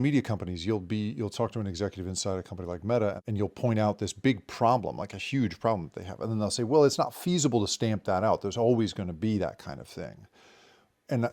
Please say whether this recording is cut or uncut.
cut